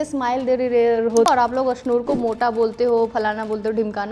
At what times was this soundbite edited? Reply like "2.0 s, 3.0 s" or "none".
1.3 s